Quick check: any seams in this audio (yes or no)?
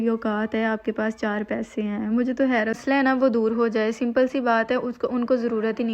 yes